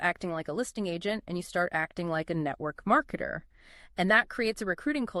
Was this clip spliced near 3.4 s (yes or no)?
no